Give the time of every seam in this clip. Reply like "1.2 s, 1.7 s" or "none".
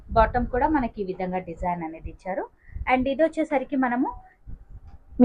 none